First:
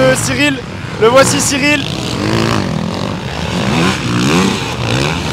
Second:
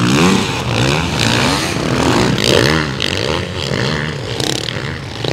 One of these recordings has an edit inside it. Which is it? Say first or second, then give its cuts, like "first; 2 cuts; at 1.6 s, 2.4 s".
second; 1 cut; at 2.4 s